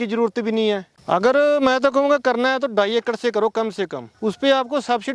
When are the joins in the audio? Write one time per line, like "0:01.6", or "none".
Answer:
0:00.9
0:04.0